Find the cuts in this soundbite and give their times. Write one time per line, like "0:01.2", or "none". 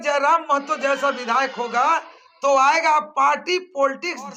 none